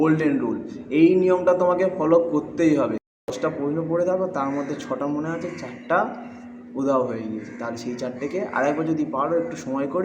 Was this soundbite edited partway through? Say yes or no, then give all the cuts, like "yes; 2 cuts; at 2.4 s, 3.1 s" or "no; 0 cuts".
yes; 1 cut; at 3.1 s